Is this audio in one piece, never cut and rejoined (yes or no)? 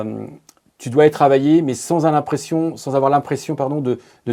yes